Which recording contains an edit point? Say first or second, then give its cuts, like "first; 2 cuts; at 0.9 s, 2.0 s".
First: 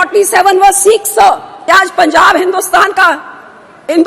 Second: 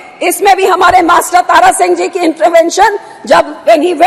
first; 1 cut; at 1.5 s